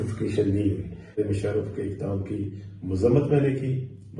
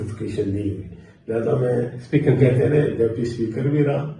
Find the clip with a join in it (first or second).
first